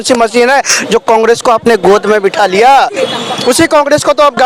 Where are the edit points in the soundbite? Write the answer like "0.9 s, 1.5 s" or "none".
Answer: none